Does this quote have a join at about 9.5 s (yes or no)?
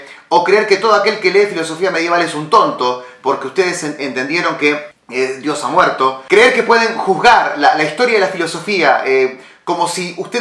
no